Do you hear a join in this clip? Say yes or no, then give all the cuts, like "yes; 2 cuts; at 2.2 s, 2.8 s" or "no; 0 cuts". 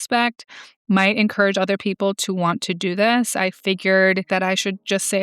yes; 1 cut; at 4.3 s